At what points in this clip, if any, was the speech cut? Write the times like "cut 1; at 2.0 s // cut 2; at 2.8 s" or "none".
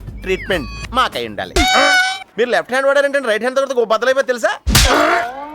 cut 1; at 1.5 s // cut 2; at 2.2 s